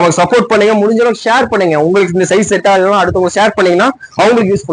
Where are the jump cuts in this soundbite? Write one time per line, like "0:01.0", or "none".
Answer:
none